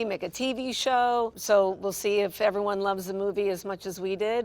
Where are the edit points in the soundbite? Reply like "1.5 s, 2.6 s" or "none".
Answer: 1.4 s